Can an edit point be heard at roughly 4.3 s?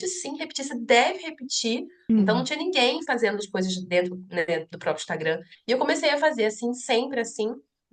no; 2 cuts; at 1.9 s, 5.5 s

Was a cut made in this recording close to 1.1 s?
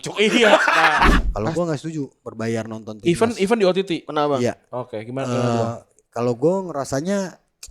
yes; 1 cut; at 1.1 s

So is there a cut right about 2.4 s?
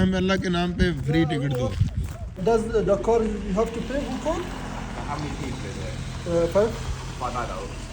yes; 1 cut; at 2.4 s

